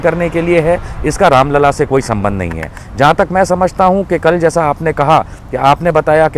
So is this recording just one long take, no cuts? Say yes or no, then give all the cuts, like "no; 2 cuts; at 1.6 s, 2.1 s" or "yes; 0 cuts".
yes; 0 cuts